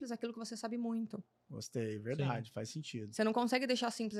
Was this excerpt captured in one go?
yes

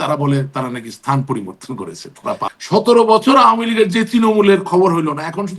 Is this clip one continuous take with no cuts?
no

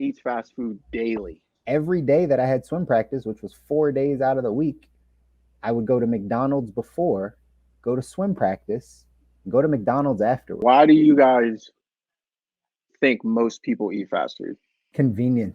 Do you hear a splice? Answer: yes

